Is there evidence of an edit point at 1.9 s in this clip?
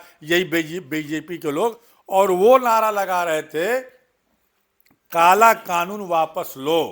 yes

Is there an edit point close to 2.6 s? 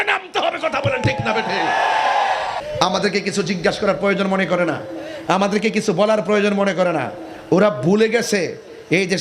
yes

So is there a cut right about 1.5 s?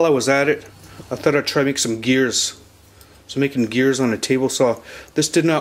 yes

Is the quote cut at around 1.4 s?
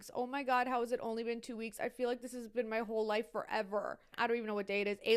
no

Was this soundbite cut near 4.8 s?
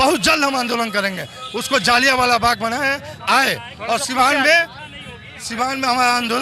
no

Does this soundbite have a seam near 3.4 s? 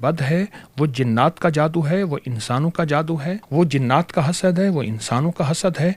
yes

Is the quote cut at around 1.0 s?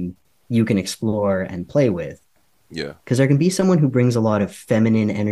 no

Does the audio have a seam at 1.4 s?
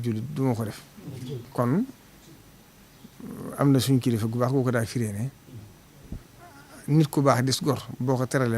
yes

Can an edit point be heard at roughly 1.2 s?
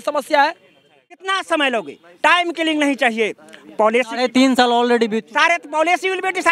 yes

